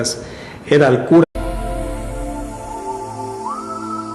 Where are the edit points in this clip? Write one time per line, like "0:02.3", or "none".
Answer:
none